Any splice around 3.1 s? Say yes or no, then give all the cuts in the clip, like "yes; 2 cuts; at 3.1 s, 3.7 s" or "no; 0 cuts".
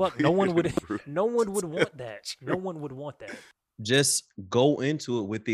yes; 1 cut; at 3.1 s